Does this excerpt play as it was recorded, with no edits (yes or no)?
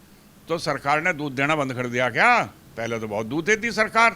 yes